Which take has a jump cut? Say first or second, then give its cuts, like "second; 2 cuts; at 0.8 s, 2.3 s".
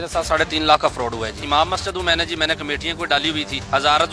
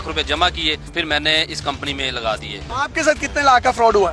second; 2 cuts; at 0.9 s, 2.6 s